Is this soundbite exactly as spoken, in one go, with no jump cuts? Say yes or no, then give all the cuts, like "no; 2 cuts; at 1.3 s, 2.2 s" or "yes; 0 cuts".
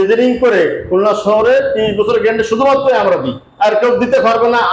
yes; 0 cuts